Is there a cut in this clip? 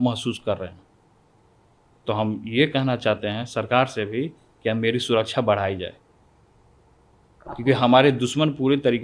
no; 0 cuts

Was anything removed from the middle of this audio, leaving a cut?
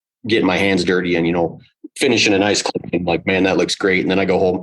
yes; 1 cut; at 2.7 s

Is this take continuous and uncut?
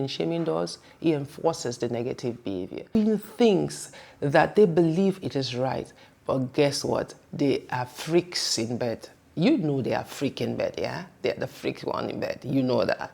no; 1 cut; at 3.0 s

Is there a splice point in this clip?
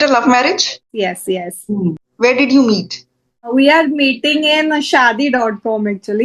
yes; 3 cuts; at 0.9 s, 2.0 s, 3.5 s

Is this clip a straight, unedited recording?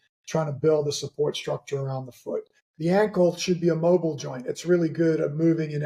no; 1 cut; at 2.6 s

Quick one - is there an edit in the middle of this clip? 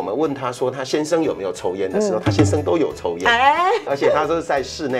yes; 1 cut; at 3.8 s

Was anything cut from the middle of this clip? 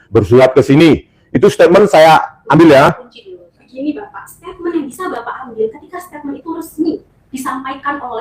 no; 0 cuts

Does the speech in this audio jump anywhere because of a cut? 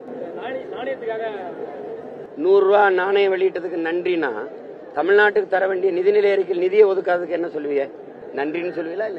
yes; 1 cut; at 8.2 s

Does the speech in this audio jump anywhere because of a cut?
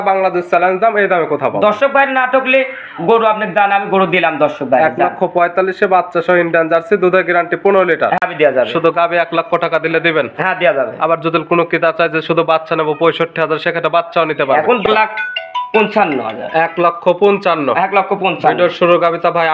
yes; 2 cuts; at 8.2 s, 14.8 s

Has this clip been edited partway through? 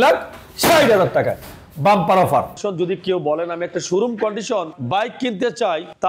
yes; 1 cut; at 2.6 s

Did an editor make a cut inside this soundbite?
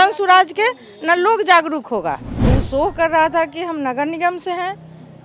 yes; 1 cut; at 2.3 s

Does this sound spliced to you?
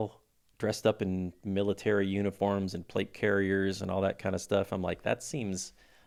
no; 0 cuts

